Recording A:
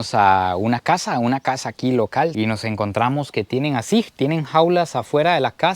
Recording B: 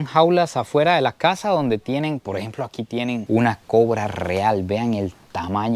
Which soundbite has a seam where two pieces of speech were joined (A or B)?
A